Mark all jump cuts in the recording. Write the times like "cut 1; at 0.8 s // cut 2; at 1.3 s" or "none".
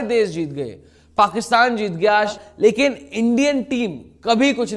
cut 1; at 2.4 s